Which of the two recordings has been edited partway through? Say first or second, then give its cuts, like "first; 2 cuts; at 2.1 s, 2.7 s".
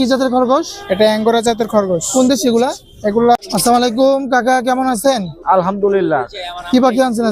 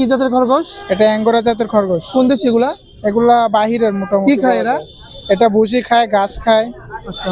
first; 1 cut; at 3.4 s